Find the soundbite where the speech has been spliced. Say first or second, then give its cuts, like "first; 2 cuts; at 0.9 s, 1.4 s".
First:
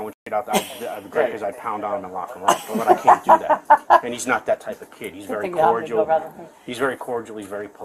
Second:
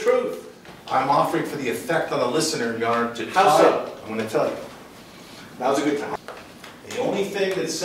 second; 1 cut; at 6.1 s